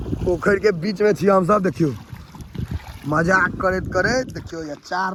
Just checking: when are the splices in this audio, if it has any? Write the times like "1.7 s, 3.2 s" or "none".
none